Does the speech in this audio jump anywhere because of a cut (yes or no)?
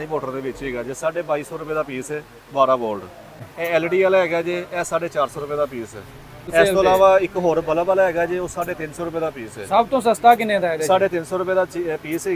yes